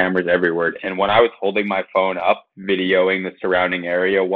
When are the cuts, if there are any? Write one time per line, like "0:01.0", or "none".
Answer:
0:00.8
0:02.5